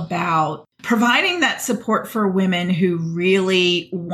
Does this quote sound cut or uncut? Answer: uncut